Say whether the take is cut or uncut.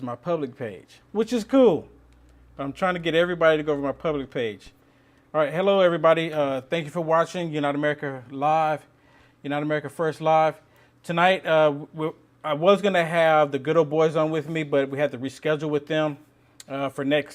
cut